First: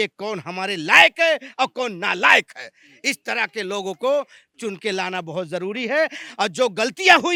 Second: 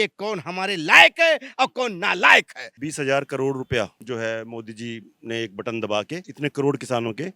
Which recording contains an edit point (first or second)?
second